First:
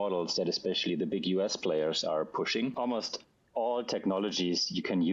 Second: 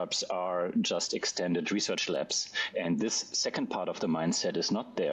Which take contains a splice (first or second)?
first